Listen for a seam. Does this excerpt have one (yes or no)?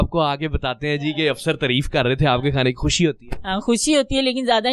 no